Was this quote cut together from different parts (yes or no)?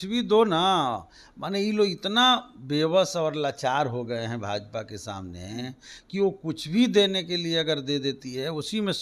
no